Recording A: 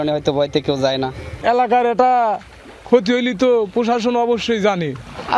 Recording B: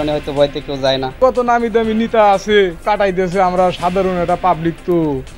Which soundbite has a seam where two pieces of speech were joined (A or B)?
B